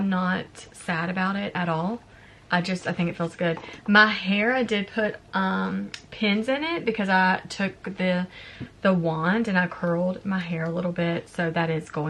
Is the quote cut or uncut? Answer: uncut